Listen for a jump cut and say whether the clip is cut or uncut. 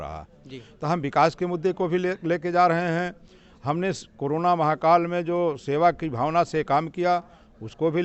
uncut